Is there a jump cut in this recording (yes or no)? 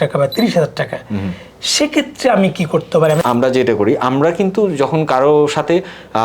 yes